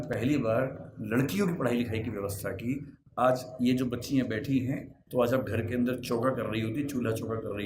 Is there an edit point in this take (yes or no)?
yes